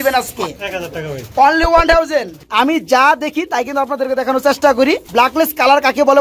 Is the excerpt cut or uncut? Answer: cut